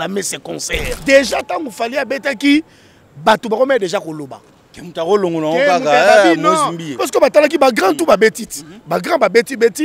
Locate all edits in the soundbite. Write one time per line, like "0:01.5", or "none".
0:00.9